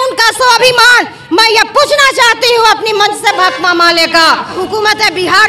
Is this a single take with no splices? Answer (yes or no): no